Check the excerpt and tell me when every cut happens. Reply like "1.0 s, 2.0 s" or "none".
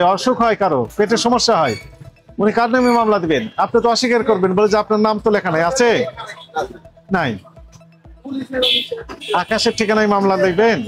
none